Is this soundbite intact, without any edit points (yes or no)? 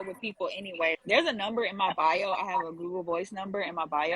no